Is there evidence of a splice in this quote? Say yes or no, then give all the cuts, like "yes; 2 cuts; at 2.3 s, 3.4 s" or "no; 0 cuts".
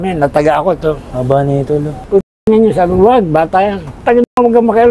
yes; 2 cuts; at 1.0 s, 2.1 s